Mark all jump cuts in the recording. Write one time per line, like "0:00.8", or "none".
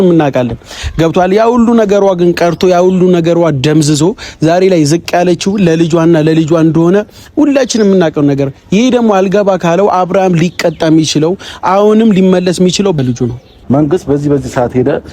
0:13.0

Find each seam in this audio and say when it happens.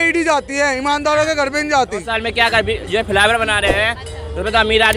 0:02.2

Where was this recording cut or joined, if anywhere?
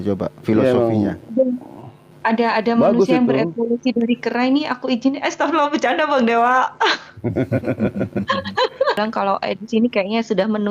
0:09.0

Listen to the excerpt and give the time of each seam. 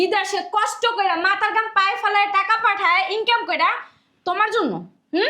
none

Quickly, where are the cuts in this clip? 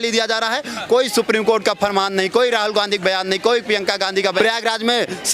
0:04.2

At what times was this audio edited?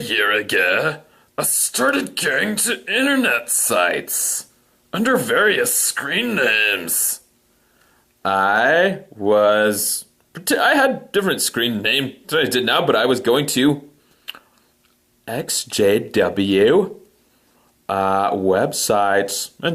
0:08.0

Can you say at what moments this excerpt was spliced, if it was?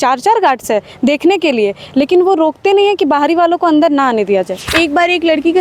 0:04.7

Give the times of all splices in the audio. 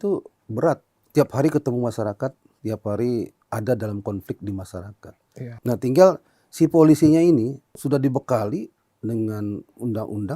0:00.9
0:03.4
0:05.5
0:07.7

